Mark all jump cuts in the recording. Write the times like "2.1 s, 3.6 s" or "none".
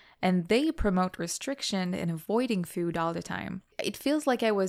3.7 s